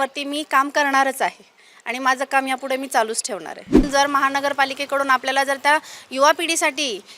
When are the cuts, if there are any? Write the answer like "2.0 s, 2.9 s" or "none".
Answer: 3.7 s